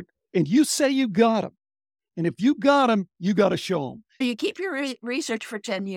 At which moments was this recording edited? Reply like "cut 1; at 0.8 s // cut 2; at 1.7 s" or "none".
cut 1; at 4.2 s